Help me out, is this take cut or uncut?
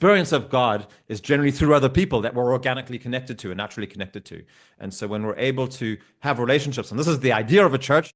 uncut